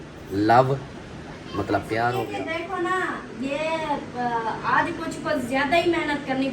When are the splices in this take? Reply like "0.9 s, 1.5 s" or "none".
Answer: 2.2 s